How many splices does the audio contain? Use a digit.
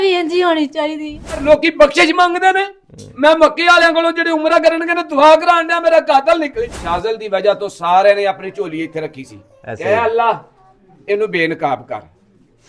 2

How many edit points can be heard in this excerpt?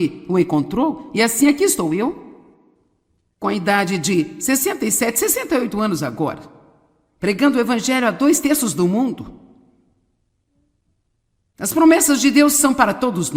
1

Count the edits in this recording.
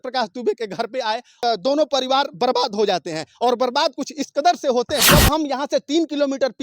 2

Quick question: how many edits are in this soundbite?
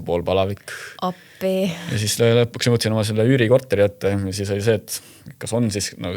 1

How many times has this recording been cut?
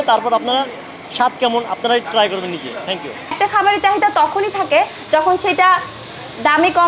1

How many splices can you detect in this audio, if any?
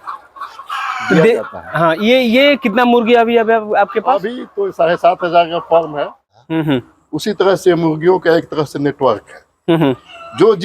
1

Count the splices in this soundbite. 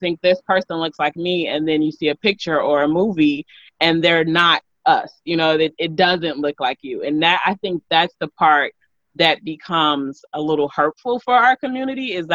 0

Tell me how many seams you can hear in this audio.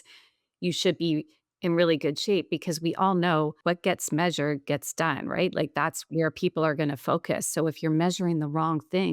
1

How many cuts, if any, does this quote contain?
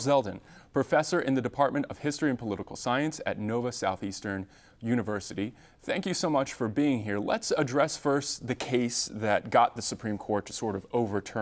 1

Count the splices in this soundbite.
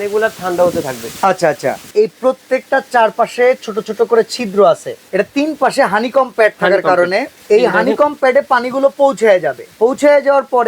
4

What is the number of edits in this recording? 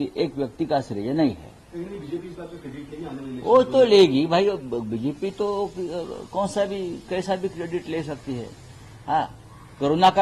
0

